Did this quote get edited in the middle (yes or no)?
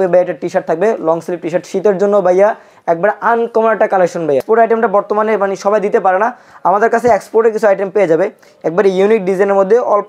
yes